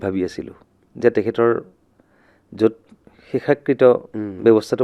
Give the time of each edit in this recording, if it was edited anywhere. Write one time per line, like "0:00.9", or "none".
none